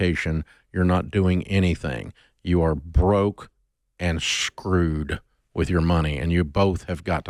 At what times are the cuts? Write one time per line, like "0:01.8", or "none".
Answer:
none